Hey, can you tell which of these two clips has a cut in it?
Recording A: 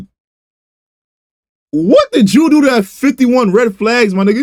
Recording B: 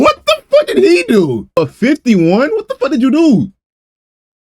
B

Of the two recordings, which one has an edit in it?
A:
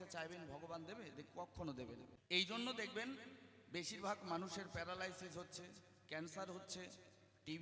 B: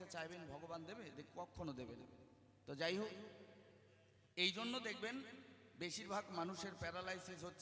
A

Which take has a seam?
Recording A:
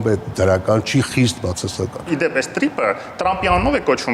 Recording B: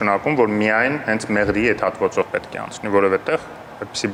A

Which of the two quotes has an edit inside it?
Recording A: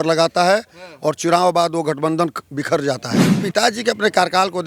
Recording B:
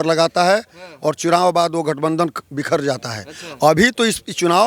A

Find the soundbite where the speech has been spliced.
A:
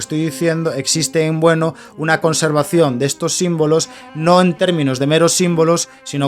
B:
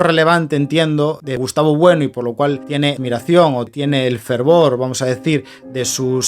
B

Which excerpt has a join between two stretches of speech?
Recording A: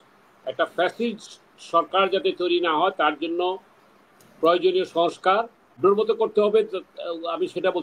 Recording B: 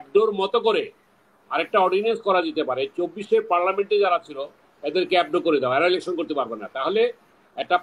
A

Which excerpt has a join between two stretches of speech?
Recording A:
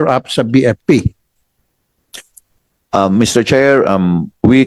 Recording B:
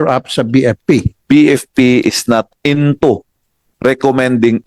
B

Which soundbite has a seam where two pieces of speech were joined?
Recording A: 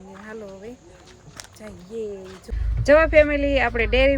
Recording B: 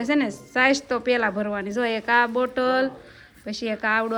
A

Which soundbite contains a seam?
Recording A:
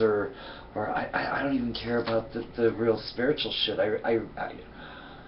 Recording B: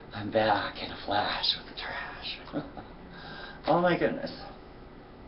A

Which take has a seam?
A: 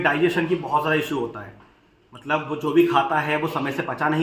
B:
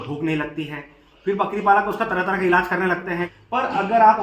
B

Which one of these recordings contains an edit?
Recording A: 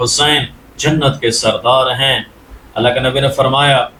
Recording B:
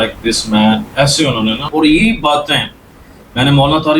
B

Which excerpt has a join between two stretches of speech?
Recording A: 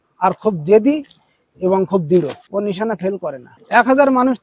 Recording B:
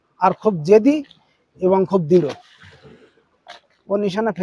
A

